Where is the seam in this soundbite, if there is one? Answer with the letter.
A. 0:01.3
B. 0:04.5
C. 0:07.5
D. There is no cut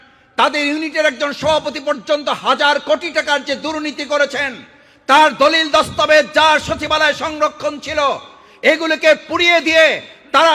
D